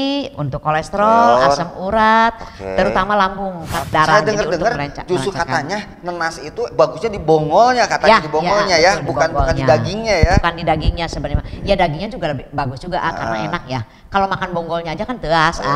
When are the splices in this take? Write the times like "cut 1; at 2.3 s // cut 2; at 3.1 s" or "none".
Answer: cut 1; at 3.8 s